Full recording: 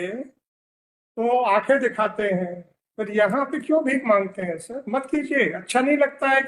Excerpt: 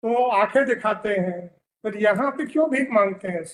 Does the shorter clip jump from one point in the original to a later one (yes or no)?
no